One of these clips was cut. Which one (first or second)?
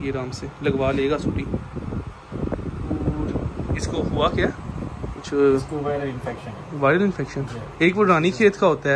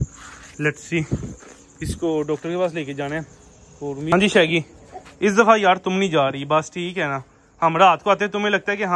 second